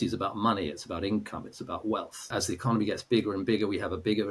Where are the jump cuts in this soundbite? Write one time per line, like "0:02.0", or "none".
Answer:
0:02.3